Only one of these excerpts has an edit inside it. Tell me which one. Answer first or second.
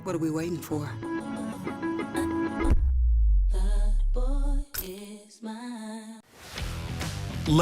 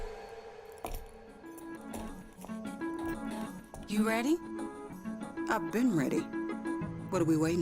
first